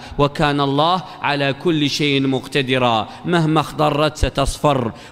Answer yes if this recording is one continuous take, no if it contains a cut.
yes